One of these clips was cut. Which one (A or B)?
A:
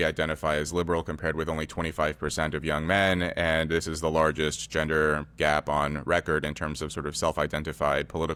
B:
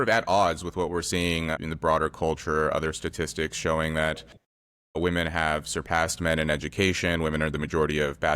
B